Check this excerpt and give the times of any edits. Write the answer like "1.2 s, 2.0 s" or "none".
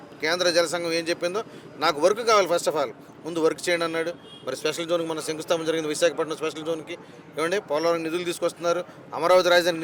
none